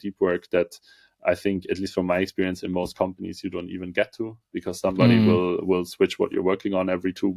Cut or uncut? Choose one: uncut